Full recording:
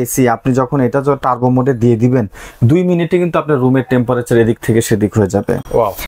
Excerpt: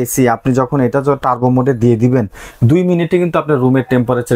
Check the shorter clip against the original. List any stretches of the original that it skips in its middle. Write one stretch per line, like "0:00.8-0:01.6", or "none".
none